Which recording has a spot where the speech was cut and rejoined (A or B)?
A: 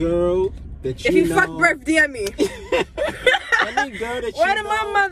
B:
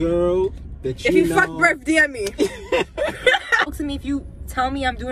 B